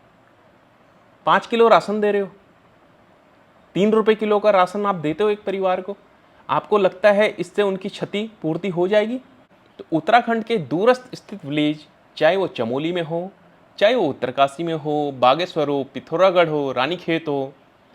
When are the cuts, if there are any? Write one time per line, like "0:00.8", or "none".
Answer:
0:09.4